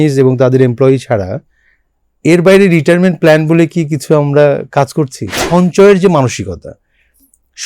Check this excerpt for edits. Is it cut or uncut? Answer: cut